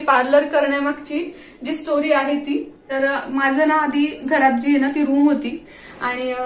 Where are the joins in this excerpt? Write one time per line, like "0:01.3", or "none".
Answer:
none

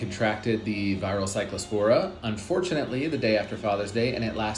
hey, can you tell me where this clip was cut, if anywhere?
none

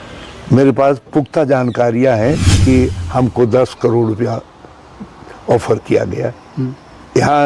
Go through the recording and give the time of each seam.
0:02.5

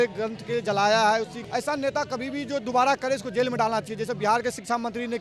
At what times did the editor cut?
0:01.4

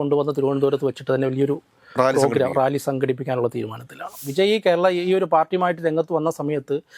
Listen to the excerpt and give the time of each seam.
0:04.2

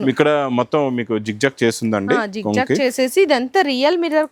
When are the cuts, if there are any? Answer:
none

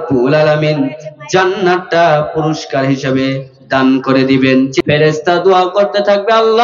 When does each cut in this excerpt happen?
0:04.8

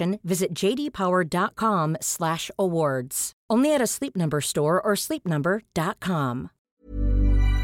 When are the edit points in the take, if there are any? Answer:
0:06.7

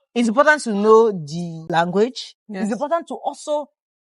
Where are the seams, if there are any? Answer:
0:01.6

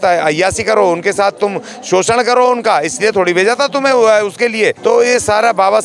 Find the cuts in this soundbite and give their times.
0:04.8

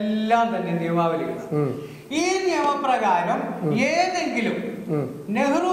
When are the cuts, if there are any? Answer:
none

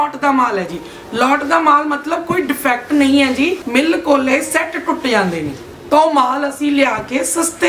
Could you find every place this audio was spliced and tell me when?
0:03.6
0:05.6

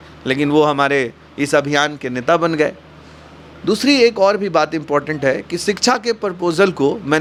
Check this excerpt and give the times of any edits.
none

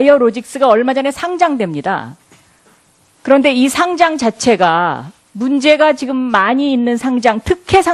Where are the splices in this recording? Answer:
0:05.9

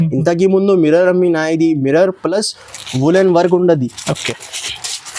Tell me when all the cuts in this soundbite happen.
none

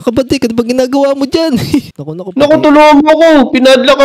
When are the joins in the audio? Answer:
none

